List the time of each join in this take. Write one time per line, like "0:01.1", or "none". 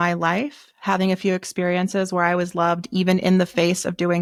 none

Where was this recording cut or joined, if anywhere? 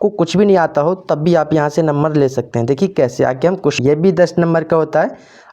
0:03.8

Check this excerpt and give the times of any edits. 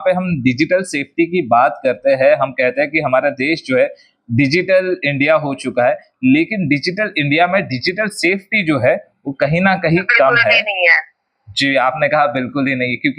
none

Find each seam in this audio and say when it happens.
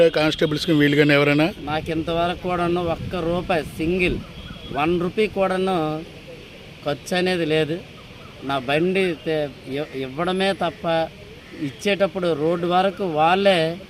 none

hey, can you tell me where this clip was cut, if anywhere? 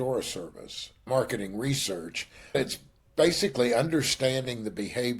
0:01.0
0:02.6

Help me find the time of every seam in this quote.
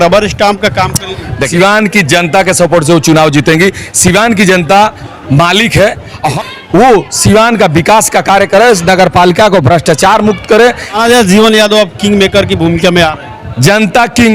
0:01.5
0:06.3
0:10.9

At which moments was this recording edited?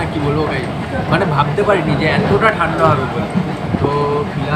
none

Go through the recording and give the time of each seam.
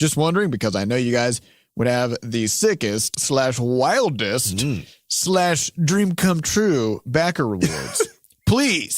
0:03.1

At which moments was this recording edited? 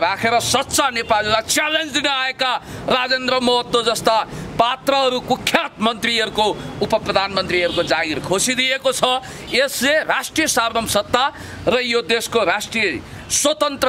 none

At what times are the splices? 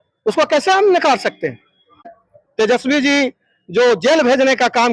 0:02.1

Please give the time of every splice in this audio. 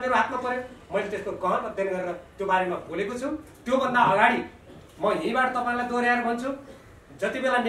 none

